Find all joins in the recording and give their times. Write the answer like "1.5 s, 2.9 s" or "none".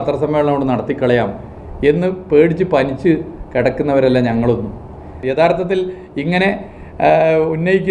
5.1 s

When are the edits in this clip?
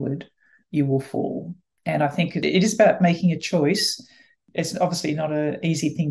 2.1 s, 4.4 s

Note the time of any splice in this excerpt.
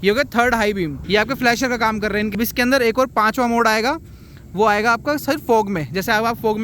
1.0 s, 2.3 s

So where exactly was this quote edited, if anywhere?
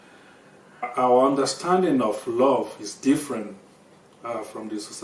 0.9 s

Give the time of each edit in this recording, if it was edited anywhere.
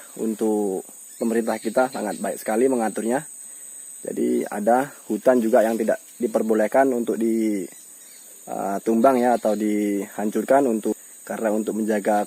10.9 s

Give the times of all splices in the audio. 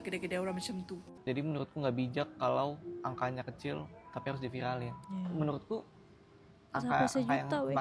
1.1 s

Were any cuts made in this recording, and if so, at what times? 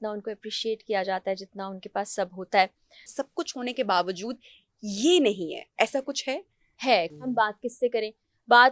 3.1 s, 7.1 s

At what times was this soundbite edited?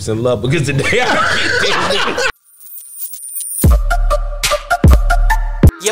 2.3 s

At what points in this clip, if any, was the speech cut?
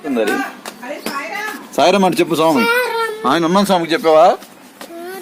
none

